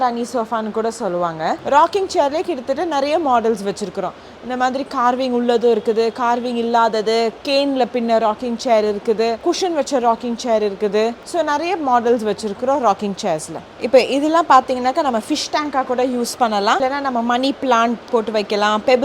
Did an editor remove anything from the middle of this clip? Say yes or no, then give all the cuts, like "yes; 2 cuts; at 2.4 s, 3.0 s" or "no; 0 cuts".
yes; 2 cuts; at 1.6 s, 13.8 s